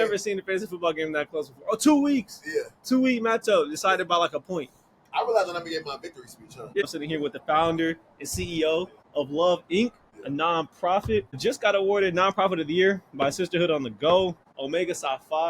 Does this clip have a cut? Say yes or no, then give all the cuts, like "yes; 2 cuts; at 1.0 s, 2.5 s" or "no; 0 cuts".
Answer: yes; 2 cuts; at 6.8 s, 14.5 s